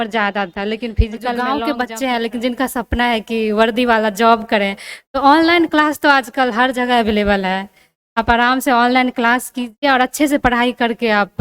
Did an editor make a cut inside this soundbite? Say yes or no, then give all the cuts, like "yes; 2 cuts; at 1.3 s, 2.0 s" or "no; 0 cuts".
yes; 1 cut; at 1.4 s